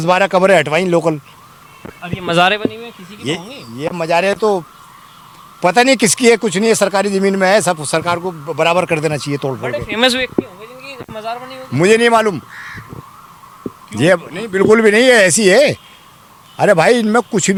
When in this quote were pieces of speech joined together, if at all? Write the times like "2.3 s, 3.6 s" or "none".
none